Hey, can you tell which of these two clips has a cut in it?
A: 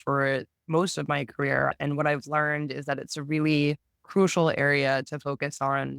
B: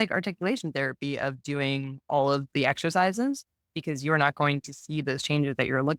A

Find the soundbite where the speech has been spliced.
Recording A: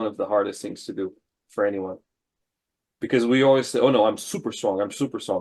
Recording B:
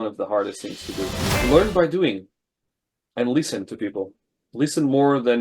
B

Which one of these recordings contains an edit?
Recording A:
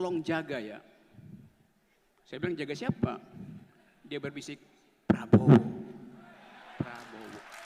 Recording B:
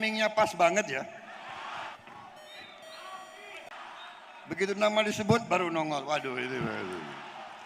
B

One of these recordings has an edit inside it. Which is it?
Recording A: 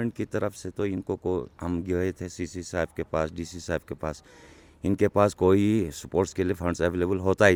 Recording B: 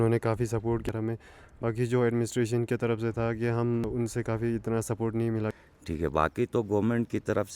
B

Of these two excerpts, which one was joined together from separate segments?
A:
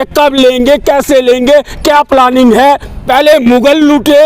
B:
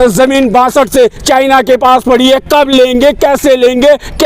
A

